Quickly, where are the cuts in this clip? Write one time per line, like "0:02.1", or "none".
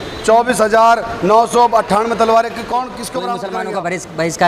0:03.4